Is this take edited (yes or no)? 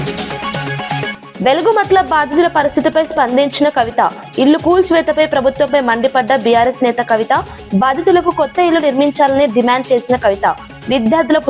yes